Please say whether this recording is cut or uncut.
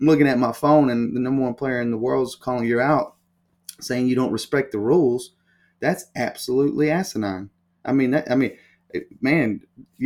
uncut